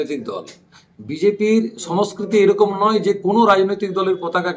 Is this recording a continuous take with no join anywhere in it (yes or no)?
yes